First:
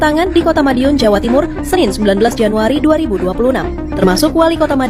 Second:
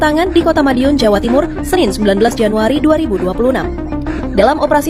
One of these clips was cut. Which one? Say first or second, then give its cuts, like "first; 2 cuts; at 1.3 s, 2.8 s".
first; 1 cut; at 3.8 s